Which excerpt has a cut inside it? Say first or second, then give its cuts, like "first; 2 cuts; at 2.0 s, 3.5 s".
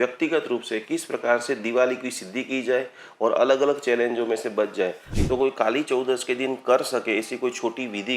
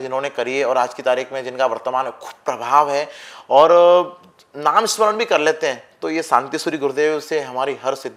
first; 1 cut; at 5.1 s